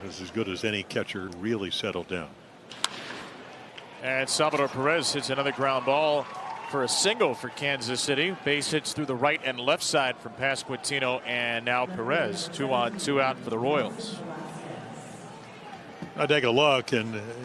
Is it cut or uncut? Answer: cut